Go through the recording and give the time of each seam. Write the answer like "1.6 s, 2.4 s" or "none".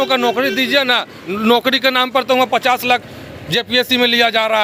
none